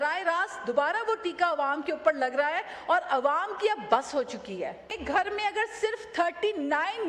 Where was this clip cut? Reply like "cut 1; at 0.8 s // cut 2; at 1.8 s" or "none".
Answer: cut 1; at 4.9 s